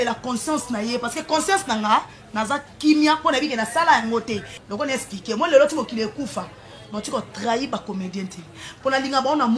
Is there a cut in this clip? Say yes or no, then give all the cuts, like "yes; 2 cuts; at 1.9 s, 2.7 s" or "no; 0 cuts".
yes; 1 cut; at 4.5 s